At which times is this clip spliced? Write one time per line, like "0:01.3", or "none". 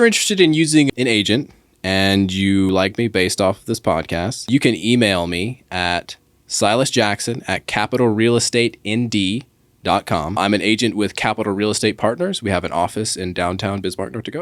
0:00.9
0:02.7
0:04.5
0:10.4